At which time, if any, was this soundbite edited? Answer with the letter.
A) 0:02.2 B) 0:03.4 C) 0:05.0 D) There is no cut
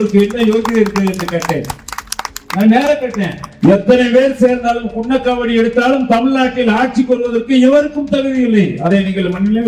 B